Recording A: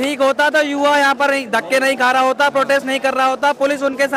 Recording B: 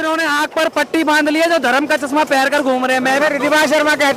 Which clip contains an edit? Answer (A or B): B